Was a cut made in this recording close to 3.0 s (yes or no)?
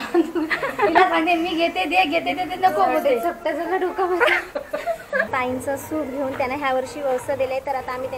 no